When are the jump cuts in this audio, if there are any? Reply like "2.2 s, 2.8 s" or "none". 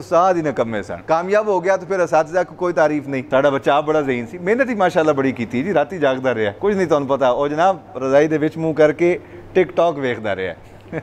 0.9 s, 3.2 s, 6.5 s